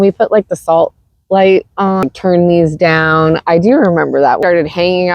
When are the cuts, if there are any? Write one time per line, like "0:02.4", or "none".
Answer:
0:02.1
0:04.4